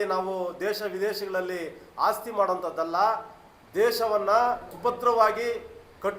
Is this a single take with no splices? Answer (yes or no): no